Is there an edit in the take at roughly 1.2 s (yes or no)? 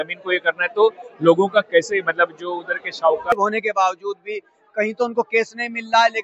no